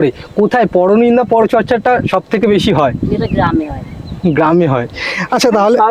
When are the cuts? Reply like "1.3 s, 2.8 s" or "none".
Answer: none